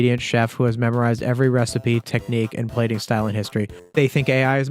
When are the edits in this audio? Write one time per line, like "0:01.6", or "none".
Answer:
0:03.8